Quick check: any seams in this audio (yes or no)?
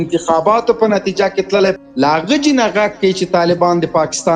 yes